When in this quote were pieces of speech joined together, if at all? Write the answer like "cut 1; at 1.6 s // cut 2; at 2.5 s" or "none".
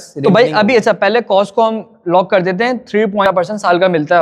cut 1; at 3.2 s